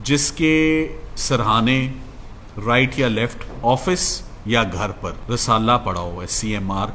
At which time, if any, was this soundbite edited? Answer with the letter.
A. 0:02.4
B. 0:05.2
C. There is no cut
B